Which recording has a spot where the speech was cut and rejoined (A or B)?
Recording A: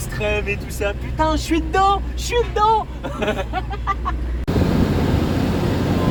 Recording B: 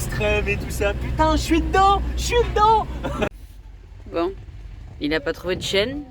B